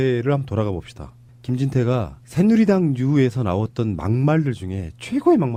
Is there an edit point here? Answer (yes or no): no